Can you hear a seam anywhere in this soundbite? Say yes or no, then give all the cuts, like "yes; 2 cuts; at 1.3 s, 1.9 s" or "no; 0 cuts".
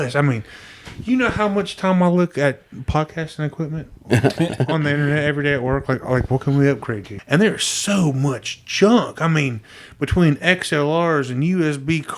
yes; 1 cut; at 7.1 s